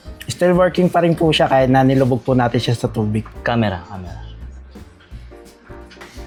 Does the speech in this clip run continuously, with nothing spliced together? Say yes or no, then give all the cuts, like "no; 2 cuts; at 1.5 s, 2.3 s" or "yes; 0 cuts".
yes; 0 cuts